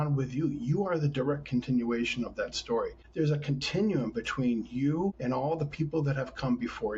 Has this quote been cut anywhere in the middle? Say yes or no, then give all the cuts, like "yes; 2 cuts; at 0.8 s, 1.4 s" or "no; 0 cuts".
yes; 2 cuts; at 3.0 s, 5.2 s